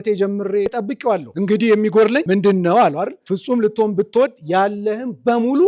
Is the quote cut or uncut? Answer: cut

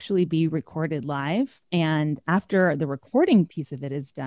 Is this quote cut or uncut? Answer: cut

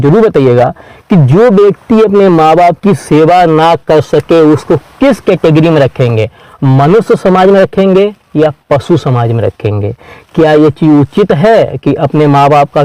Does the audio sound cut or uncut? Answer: uncut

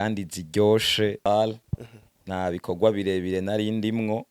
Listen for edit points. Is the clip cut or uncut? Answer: cut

